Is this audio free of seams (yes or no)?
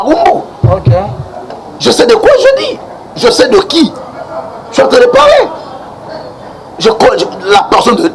yes